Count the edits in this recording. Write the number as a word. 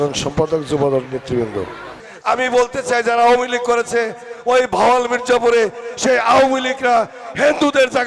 one